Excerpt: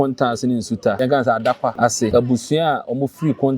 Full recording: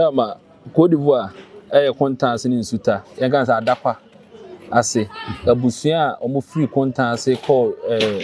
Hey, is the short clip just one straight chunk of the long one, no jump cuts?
no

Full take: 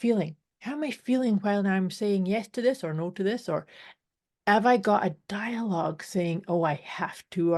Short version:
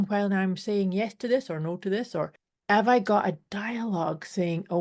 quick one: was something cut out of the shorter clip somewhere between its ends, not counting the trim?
yes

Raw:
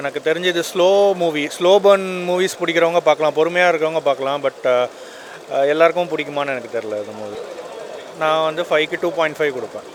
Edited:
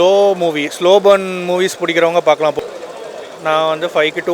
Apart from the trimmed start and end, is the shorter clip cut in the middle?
yes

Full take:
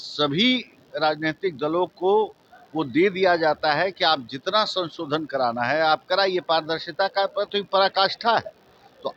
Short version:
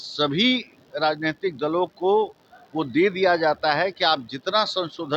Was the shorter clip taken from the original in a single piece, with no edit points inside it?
yes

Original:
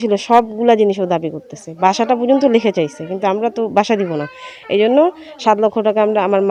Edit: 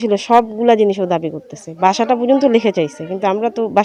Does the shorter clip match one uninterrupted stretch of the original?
yes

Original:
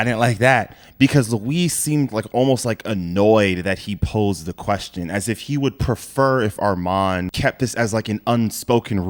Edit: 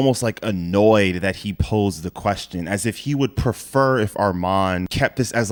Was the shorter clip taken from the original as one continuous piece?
yes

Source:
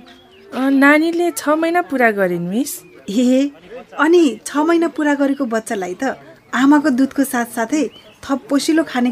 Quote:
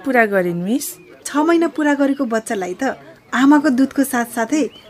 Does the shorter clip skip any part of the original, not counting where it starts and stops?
yes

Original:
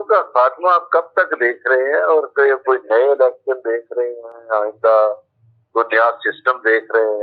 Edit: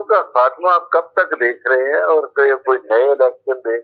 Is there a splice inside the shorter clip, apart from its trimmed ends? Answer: no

